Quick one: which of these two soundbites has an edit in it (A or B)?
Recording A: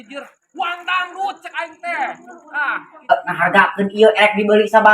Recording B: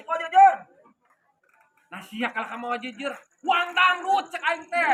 A